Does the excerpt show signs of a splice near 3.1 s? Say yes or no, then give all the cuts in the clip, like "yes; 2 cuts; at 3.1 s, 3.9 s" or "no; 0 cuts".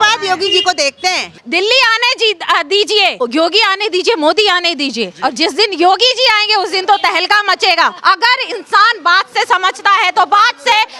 yes; 3 cuts; at 1.3 s, 3.1 s, 8.0 s